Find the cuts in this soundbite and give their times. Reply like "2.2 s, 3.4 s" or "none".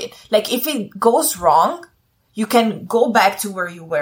none